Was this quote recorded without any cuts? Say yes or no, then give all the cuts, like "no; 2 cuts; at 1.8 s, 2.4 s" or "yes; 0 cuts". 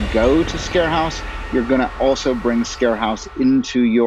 yes; 0 cuts